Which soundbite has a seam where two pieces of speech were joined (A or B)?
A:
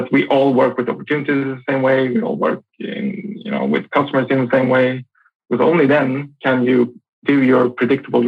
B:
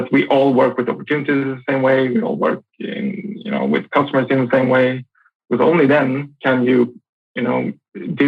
A